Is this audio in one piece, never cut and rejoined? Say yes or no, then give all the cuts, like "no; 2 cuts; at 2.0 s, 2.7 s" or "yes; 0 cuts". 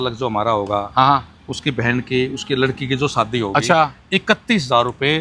yes; 0 cuts